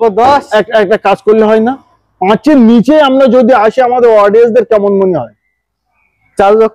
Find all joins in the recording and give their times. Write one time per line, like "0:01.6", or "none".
none